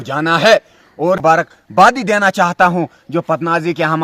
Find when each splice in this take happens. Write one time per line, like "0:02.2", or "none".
0:01.2